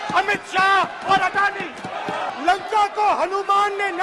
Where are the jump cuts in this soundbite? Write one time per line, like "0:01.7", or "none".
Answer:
0:02.3